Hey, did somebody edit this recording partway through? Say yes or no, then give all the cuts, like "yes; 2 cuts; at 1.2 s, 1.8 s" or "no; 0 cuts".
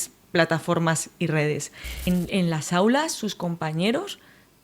yes; 1 cut; at 2.1 s